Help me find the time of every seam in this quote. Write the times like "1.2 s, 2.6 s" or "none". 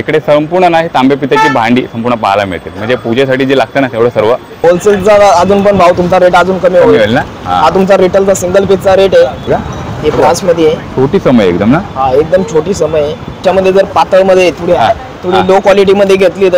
4.6 s, 9.5 s, 13.4 s